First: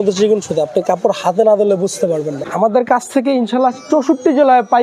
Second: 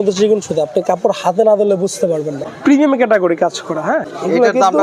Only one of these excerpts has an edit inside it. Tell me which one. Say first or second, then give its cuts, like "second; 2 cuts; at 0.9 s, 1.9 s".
first; 1 cut; at 2.4 s